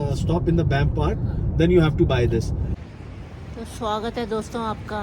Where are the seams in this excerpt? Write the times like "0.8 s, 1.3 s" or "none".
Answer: 2.8 s